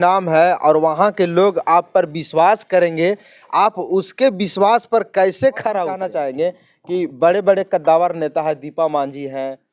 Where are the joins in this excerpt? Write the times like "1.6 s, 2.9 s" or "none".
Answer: 6.1 s